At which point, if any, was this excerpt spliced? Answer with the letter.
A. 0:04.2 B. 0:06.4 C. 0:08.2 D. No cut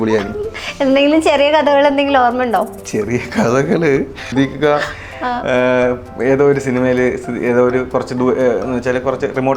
A